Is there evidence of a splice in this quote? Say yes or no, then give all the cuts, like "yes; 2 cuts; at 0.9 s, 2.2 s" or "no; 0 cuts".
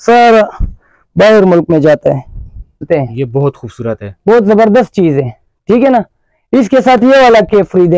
yes; 1 cut; at 2.9 s